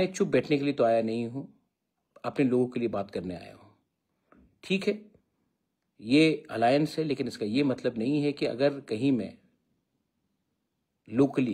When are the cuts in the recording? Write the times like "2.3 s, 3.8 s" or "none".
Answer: none